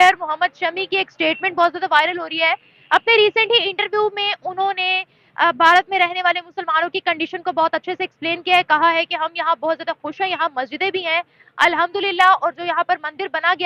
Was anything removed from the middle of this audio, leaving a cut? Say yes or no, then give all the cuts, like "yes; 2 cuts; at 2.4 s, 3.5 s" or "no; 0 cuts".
no; 0 cuts